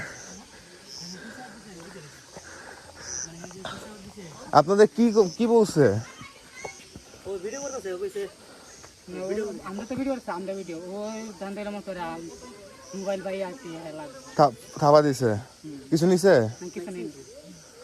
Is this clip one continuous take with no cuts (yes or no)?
yes